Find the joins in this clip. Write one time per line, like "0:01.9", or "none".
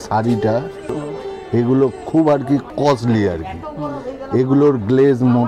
0:01.0
0:02.7